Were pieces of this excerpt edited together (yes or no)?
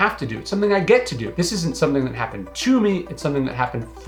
no